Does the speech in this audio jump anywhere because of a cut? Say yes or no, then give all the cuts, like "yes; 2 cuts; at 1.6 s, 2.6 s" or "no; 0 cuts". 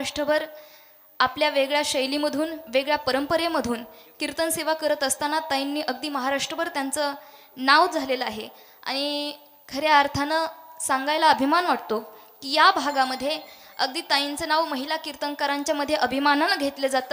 no; 0 cuts